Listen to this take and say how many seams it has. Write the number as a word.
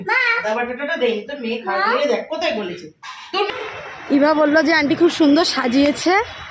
one